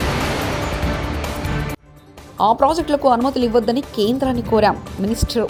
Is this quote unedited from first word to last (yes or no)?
yes